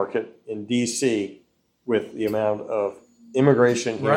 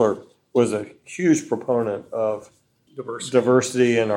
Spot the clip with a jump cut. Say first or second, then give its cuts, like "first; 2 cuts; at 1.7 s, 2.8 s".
second; 1 cut; at 2.8 s